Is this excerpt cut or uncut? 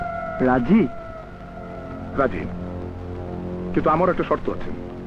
uncut